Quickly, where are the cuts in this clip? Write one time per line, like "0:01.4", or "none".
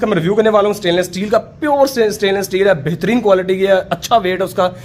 none